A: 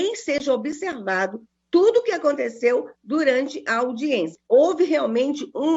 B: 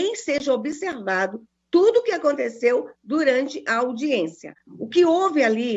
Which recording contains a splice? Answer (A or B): A